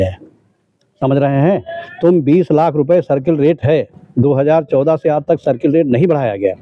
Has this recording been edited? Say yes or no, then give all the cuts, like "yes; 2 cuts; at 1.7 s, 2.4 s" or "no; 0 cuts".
no; 0 cuts